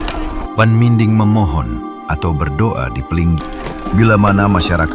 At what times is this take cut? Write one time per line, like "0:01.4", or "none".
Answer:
0:03.5